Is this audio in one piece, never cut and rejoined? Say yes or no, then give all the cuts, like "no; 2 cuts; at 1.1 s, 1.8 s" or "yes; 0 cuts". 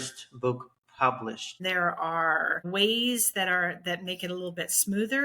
no; 2 cuts; at 1.5 s, 2.7 s